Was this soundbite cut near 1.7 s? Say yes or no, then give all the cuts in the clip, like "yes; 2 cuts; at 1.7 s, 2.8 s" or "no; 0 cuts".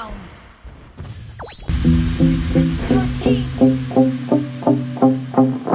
yes; 1 cut; at 1.7 s